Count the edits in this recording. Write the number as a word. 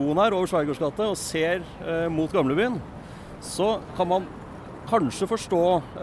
zero